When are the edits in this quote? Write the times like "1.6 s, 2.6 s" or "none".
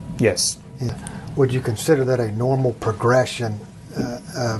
1.0 s